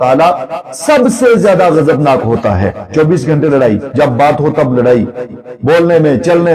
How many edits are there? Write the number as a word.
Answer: one